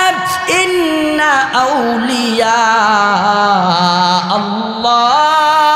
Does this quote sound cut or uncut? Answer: uncut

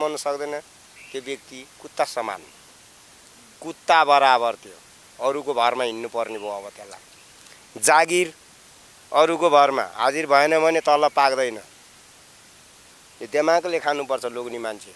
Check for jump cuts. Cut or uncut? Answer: uncut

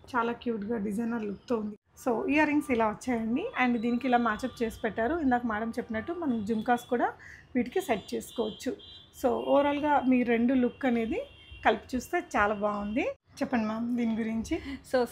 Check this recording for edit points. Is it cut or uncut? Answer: uncut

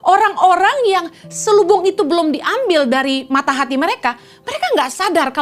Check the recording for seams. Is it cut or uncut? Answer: uncut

